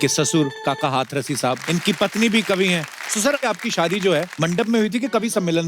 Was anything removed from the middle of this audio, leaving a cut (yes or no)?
yes